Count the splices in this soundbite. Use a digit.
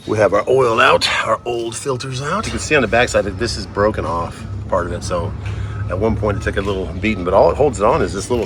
1